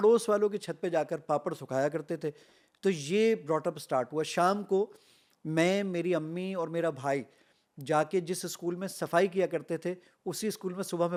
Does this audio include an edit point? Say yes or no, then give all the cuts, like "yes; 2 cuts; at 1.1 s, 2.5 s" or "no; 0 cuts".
no; 0 cuts